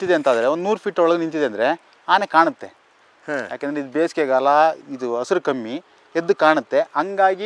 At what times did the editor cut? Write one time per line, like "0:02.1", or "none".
none